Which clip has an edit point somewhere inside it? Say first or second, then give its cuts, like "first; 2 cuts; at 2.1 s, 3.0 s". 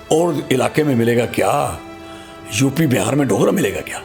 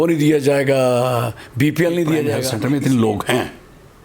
second; 1 cut; at 2.5 s